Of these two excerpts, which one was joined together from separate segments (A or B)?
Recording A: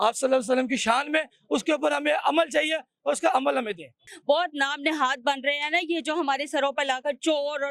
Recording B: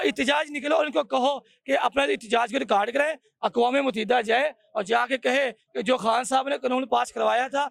A